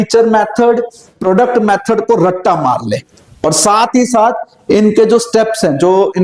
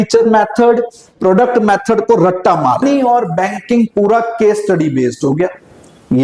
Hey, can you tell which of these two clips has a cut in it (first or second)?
second